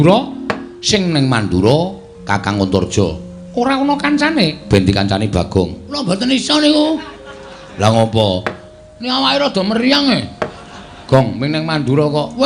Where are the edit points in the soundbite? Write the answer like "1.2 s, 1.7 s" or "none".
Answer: 6.0 s